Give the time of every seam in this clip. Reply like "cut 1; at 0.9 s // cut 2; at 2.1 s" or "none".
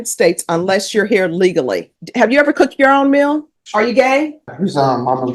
cut 1; at 2.0 s // cut 2; at 3.6 s // cut 3; at 4.5 s